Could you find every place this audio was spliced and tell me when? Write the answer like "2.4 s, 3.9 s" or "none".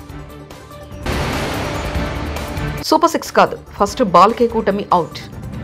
1.0 s